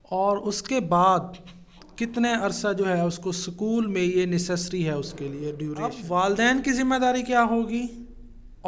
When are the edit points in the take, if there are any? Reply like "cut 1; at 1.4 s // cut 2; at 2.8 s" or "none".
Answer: cut 1; at 5.9 s